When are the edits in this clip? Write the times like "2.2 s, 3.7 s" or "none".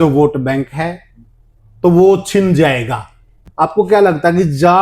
3.5 s